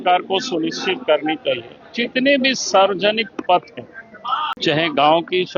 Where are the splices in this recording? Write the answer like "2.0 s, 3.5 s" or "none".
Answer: 4.6 s